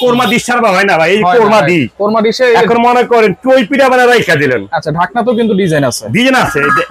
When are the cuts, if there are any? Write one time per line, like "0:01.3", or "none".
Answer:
none